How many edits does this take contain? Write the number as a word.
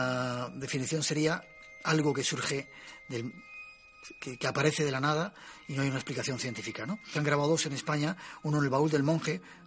zero